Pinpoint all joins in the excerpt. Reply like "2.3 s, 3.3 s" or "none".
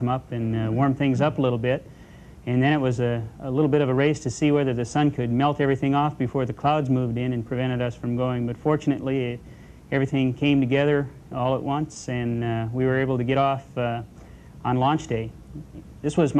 12.0 s